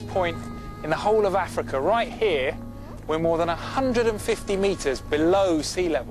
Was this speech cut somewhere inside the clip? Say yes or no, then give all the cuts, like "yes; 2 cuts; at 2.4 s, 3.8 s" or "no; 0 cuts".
yes; 1 cut; at 1.7 s